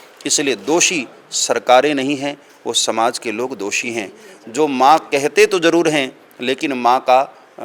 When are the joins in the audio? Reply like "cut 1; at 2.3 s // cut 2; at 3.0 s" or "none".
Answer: none

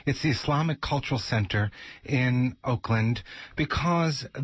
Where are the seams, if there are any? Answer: cut 1; at 2.8 s

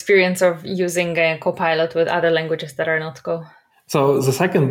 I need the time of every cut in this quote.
none

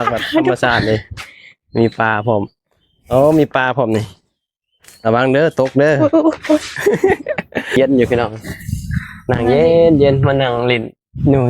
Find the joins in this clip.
cut 1; at 7.8 s

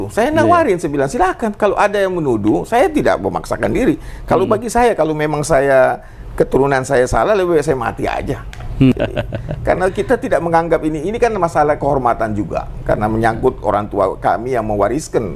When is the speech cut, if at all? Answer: cut 1; at 8.9 s

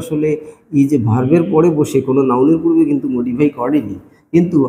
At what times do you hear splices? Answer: none

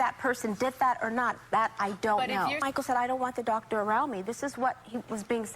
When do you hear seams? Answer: cut 1; at 2.6 s

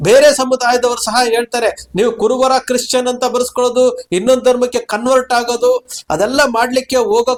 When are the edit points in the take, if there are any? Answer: none

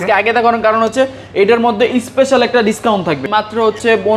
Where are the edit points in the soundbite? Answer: cut 1; at 3.2 s

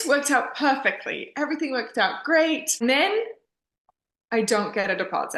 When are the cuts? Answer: cut 1; at 2.8 s

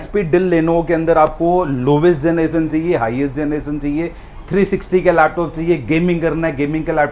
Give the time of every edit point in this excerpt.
none

